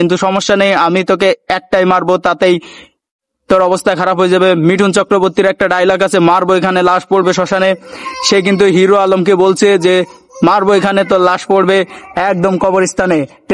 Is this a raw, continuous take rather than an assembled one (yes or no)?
yes